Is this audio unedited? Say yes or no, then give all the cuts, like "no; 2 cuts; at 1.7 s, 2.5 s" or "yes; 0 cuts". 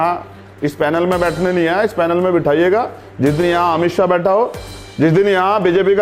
yes; 0 cuts